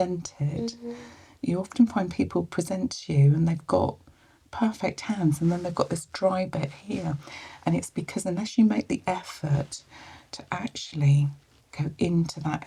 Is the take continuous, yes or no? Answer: yes